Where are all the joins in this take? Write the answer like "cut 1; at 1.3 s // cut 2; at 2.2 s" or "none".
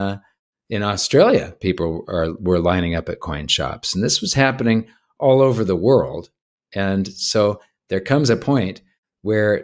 none